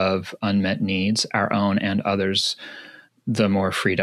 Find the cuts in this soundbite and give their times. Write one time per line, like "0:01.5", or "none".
none